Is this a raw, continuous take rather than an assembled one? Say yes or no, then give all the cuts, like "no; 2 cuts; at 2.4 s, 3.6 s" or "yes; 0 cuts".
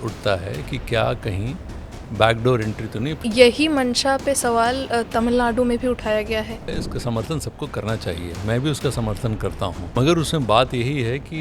no; 3 cuts; at 3.2 s, 6.7 s, 9.9 s